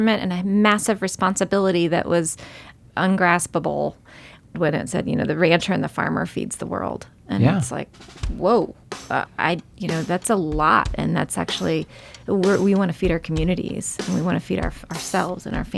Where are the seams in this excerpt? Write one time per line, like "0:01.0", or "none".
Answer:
0:02.7
0:04.5
0:09.3

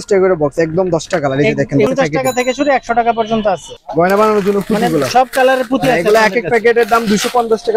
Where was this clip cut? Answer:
0:01.9
0:03.7

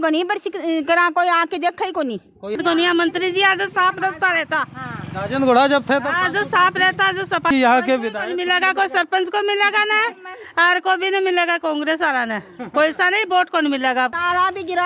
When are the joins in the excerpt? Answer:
0:02.6
0:07.5
0:14.1

